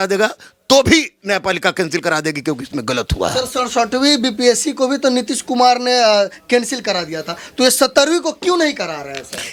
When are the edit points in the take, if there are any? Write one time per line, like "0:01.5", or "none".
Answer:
none